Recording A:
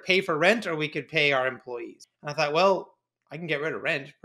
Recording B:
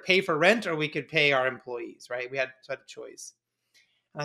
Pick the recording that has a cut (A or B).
A